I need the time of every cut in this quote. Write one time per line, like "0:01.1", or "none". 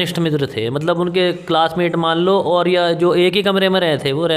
none